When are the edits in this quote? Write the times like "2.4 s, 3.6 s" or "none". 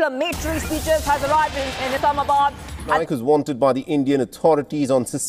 3.0 s